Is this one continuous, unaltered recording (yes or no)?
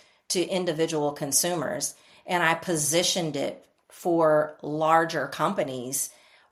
yes